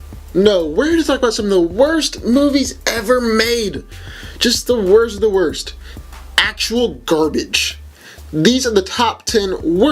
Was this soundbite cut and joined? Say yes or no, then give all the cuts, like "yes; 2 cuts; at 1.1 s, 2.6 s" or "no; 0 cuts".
no; 0 cuts